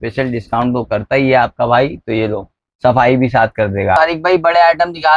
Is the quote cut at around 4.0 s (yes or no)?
yes